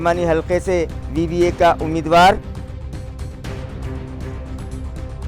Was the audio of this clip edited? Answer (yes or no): no